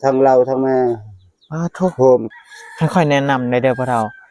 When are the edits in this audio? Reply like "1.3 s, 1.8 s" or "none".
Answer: 2.3 s